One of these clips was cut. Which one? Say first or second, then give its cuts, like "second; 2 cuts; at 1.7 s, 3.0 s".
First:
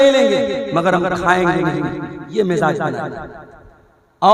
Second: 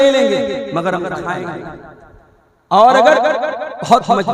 second; 1 cut; at 1.5 s